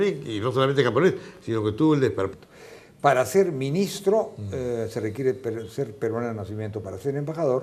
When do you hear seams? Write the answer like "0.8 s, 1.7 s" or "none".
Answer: none